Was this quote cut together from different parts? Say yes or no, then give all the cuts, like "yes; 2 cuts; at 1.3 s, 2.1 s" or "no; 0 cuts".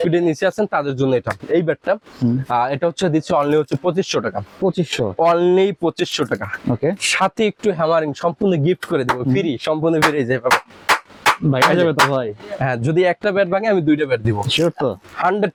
no; 0 cuts